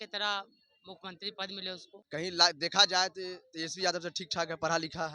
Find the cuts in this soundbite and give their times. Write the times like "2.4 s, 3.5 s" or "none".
1.9 s

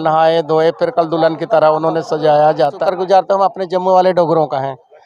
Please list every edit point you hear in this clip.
2.8 s

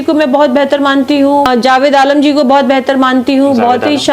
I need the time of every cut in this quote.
1.4 s

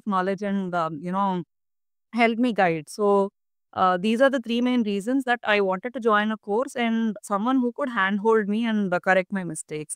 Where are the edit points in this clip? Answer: none

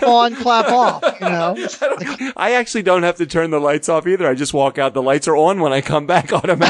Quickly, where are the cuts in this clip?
2.1 s

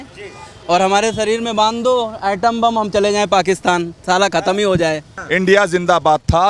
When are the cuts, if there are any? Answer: 5.1 s

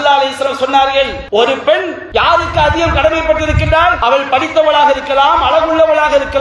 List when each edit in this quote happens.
1.2 s, 2.0 s, 4.0 s

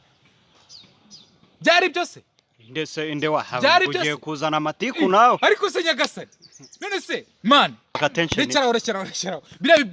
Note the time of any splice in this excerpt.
8.0 s

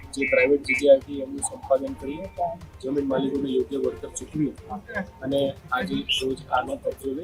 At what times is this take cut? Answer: none

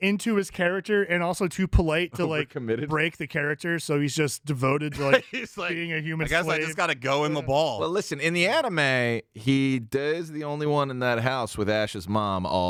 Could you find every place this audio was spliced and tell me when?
none

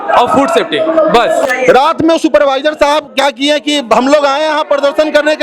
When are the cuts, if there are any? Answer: 1.4 s

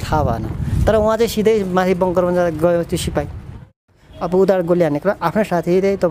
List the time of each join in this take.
3.7 s

